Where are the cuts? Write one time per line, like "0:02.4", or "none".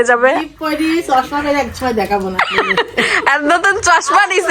none

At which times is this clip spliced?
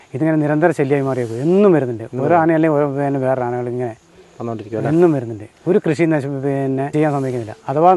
0:06.9

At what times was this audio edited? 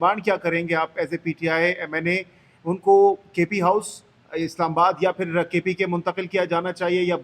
none

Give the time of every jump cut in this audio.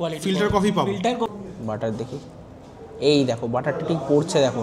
0:01.3

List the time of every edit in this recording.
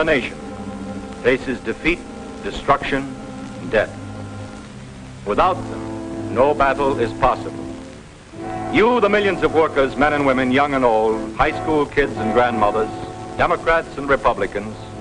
0:10.5

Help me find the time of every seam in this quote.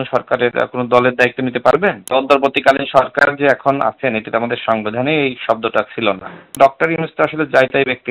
0:02.0
0:06.6

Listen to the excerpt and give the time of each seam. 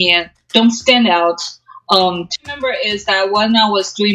0:02.3

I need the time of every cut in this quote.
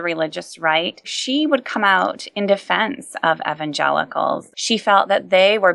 0:01.2
0:04.5

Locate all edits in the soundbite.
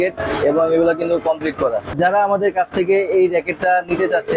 0:01.9

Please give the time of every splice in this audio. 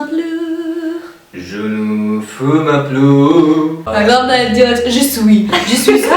none

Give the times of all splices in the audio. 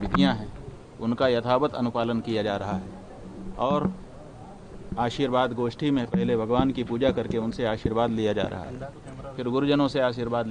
none

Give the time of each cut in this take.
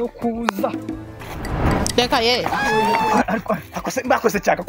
0:00.8
0:02.9

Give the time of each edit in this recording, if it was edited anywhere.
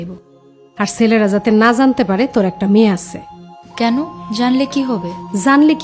none

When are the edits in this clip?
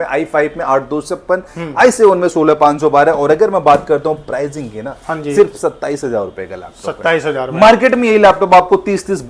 none

